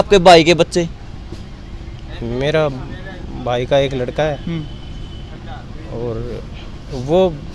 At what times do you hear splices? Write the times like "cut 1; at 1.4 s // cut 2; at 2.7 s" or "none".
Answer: none